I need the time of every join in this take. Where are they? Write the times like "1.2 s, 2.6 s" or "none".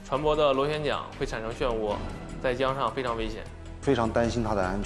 3.8 s